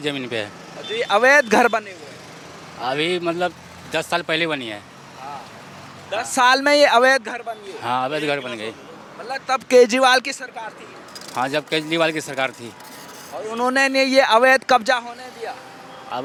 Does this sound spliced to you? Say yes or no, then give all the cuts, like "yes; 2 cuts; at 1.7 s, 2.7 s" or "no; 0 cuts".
no; 0 cuts